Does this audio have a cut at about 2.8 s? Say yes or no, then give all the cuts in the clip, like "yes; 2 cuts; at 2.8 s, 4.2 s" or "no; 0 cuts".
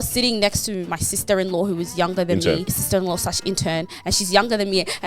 yes; 1 cut; at 2.8 s